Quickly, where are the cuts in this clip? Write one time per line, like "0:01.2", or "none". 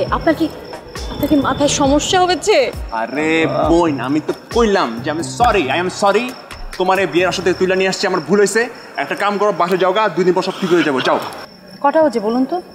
0:11.4